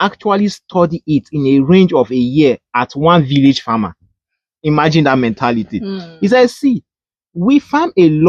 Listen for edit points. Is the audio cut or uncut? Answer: uncut